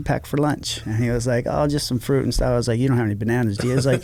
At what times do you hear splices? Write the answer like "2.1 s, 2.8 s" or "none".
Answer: none